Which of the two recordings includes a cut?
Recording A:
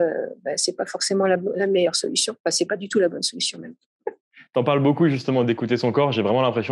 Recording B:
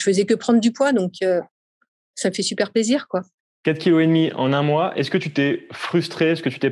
A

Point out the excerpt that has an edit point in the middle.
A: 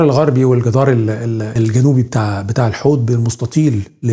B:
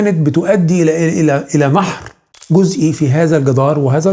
A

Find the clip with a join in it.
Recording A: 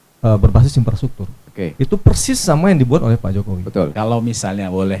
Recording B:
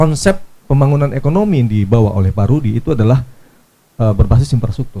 A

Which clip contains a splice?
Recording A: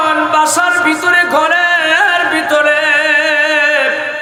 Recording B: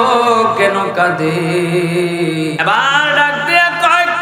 B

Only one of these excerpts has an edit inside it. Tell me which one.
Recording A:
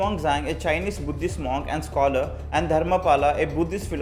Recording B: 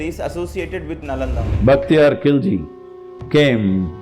B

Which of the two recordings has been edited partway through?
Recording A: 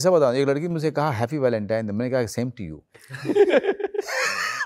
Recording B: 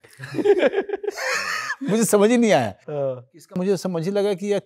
B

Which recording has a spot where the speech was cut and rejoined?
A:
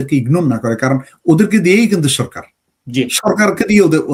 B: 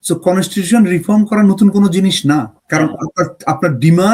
B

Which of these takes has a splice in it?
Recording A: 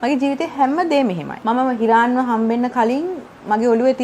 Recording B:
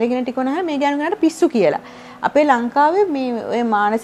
A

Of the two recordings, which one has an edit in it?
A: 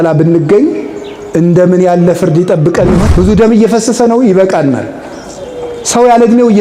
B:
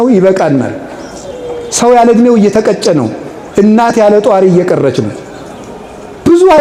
A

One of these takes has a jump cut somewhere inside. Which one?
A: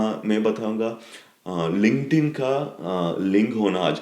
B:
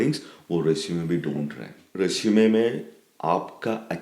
B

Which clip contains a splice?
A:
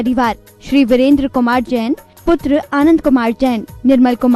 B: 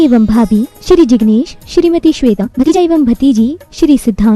B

